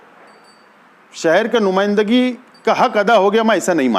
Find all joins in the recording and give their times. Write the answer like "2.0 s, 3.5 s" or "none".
none